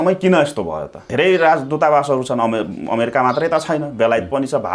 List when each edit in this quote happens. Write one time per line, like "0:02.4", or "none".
0:01.0